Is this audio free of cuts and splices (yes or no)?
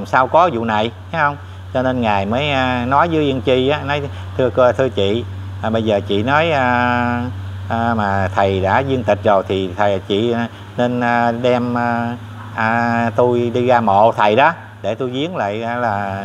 yes